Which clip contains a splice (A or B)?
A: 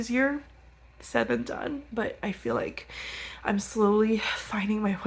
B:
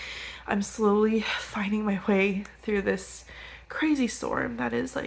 A